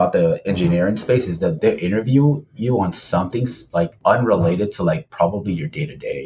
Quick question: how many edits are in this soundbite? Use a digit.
2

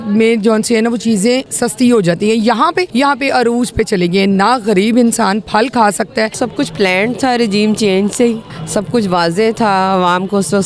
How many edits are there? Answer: 4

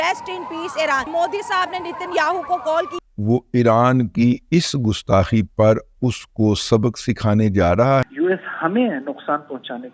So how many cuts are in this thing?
3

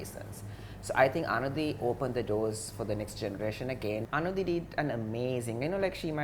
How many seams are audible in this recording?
1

